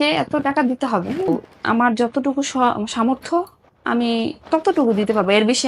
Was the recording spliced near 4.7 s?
no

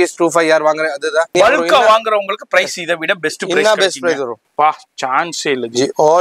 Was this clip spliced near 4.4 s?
yes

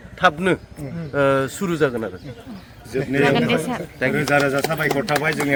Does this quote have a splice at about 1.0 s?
no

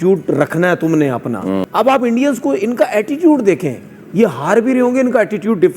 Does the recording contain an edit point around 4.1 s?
no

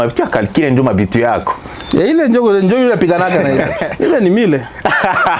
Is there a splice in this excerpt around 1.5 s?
no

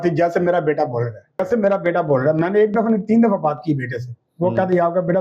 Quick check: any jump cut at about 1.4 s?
yes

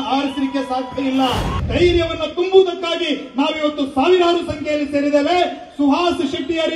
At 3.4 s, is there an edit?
no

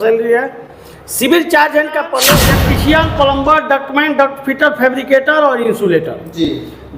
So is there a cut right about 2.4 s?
yes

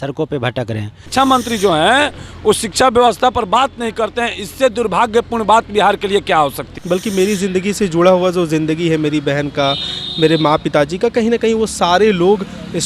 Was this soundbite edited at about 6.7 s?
yes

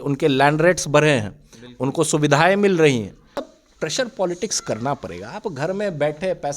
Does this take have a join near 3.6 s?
yes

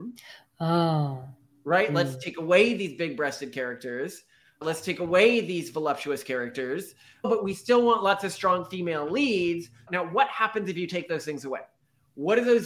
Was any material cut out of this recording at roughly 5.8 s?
no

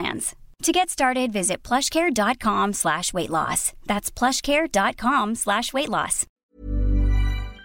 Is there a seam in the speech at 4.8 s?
no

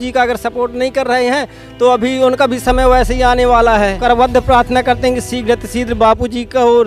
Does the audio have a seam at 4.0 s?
yes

